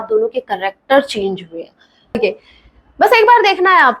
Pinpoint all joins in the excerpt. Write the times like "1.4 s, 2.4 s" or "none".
2.2 s